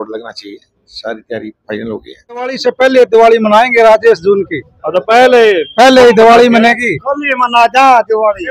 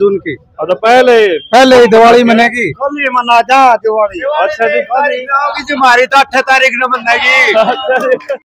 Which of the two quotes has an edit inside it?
first; 1 cut; at 2.6 s

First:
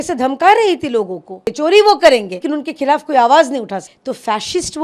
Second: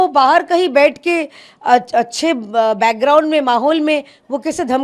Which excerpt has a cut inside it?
first; 3 cuts; at 1.5 s, 2.3 s, 3.9 s

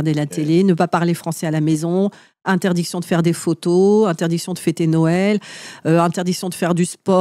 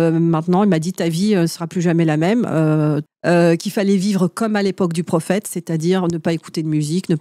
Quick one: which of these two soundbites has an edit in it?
second; 1 cut; at 3.1 s

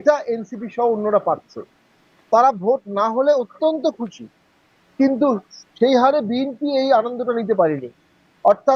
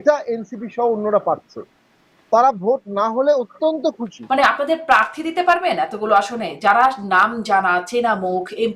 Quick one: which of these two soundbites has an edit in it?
second; 1 cut; at 4.2 s

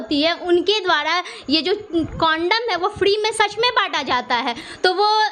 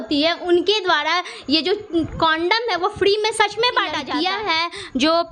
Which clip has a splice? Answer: second; 1 cut; at 4.0 s

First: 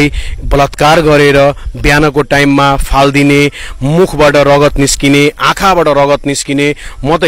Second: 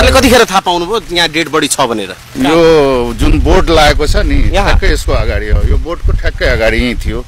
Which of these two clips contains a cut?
second; 1 cut; at 2.2 s

